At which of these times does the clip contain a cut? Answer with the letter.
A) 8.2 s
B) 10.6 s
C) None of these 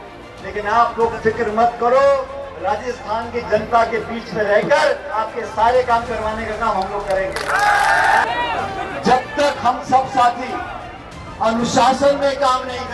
A